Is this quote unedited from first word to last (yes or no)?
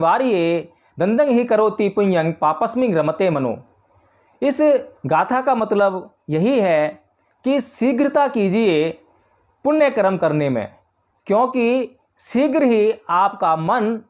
yes